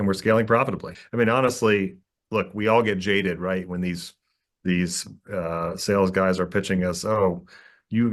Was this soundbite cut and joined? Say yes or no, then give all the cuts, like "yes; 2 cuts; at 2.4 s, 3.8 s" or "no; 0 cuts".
yes; 1 cut; at 1.0 s